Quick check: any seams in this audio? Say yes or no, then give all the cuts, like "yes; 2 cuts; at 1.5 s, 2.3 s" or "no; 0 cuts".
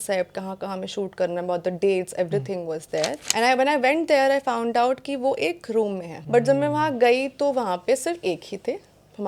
yes; 2 cuts; at 3.2 s, 6.1 s